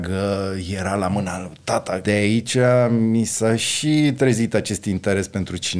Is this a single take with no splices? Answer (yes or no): no